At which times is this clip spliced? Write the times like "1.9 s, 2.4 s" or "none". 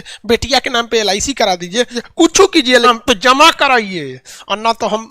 2.0 s, 2.9 s